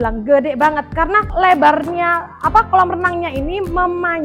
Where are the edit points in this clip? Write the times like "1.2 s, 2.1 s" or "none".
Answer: 1.3 s